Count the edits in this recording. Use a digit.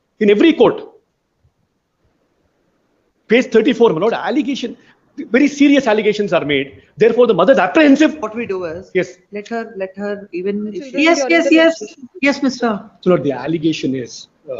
1